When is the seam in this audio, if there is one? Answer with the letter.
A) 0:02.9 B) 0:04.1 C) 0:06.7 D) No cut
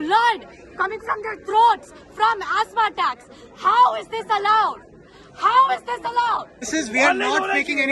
C